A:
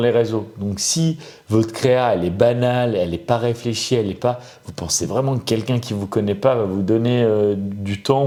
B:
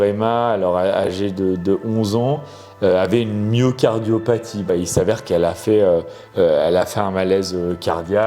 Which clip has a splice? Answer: B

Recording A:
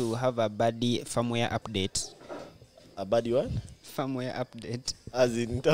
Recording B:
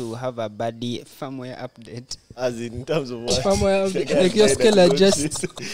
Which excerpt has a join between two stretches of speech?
B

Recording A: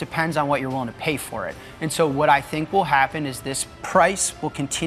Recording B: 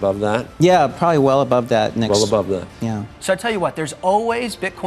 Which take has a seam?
B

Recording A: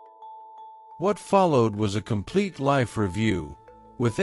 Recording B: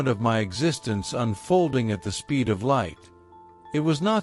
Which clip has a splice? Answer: A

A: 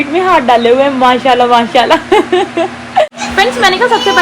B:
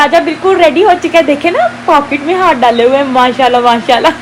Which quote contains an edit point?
A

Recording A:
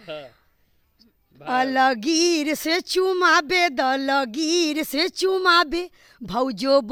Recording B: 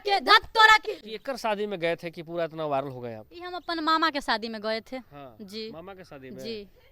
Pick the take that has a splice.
B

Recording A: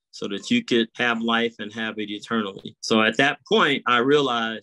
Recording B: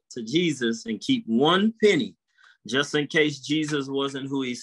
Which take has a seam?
A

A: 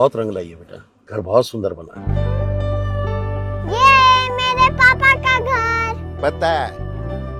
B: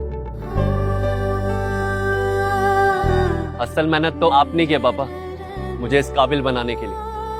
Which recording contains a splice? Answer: B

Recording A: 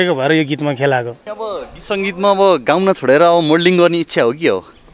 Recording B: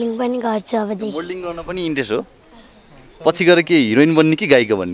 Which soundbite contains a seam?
A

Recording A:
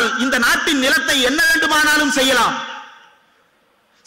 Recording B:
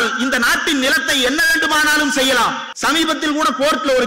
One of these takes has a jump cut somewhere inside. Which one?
B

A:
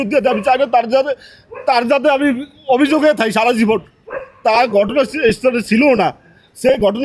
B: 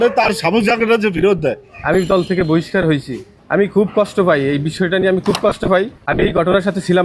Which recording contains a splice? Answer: B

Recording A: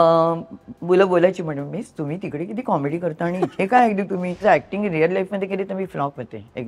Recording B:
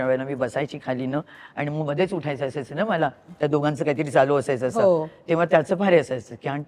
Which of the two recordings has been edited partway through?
A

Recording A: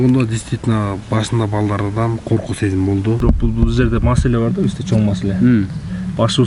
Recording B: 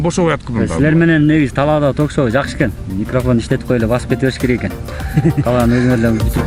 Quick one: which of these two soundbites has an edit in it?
A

